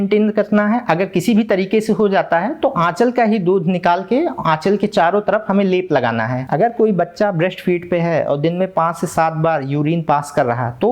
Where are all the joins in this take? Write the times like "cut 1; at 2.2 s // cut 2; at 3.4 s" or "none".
cut 1; at 6.4 s